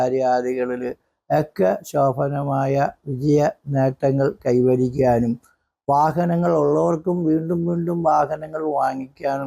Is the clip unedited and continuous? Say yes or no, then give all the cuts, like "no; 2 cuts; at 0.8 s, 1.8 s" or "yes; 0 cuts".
yes; 0 cuts